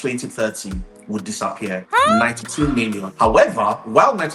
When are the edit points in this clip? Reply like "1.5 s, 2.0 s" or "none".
3.1 s